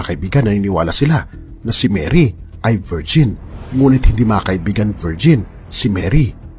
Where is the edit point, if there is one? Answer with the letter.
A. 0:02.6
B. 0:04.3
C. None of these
B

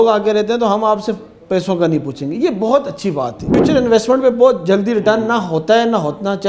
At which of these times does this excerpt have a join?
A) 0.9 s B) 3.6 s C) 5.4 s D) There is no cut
B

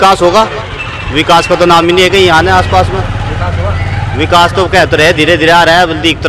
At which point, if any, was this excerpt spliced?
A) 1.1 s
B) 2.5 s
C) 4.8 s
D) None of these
D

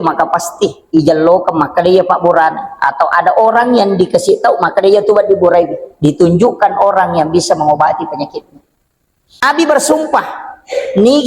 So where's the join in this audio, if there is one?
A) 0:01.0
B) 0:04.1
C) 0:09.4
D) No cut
C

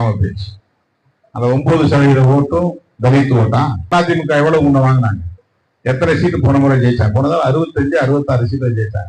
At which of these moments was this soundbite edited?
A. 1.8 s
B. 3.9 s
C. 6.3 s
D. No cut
B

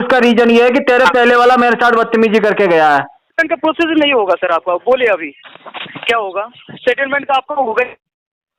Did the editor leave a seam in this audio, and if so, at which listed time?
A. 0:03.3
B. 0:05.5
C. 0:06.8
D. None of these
A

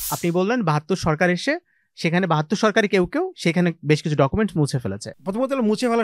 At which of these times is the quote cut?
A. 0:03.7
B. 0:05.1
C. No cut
B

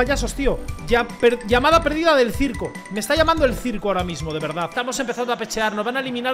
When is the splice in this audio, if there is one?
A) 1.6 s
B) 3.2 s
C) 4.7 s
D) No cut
C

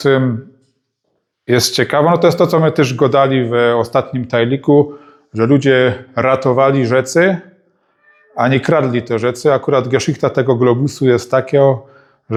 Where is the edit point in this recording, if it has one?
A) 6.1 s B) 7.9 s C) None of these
C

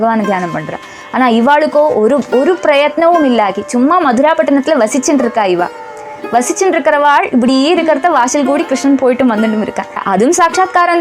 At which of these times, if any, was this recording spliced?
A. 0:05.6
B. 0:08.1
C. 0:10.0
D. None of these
C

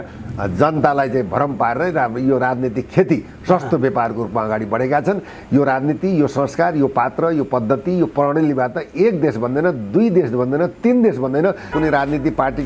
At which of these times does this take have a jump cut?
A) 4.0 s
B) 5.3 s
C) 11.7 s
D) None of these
C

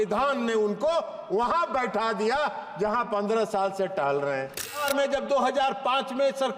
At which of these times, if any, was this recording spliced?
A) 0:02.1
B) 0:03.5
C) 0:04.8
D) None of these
C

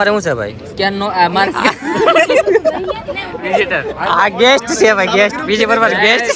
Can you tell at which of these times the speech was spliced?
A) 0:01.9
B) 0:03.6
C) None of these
C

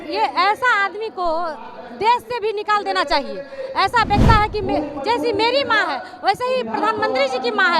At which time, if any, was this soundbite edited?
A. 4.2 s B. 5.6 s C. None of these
A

